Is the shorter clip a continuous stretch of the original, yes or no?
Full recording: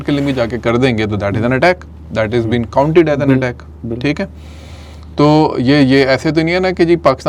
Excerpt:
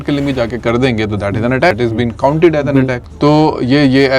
no